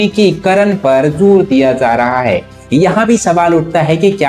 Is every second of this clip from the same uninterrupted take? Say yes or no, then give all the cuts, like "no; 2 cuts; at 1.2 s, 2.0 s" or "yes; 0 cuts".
no; 1 cut; at 2.5 s